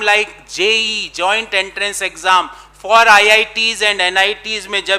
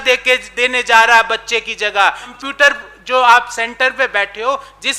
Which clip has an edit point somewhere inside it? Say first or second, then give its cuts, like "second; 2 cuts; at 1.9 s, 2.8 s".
second; 1 cut; at 2.4 s